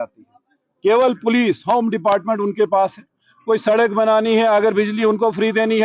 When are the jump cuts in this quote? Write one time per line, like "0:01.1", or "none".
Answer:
none